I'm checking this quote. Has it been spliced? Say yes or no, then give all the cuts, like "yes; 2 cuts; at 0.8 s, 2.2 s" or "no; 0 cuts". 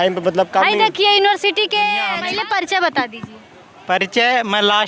yes; 1 cut; at 2.2 s